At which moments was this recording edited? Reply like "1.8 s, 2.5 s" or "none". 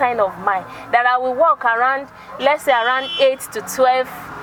none